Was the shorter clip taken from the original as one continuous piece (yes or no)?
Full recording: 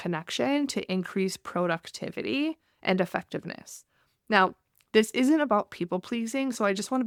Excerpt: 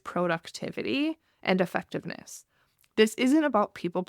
no